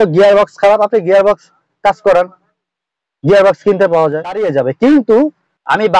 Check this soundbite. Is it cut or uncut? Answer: cut